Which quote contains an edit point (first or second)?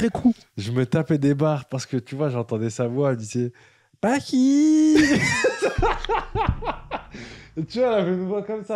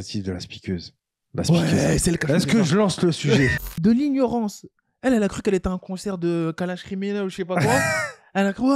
second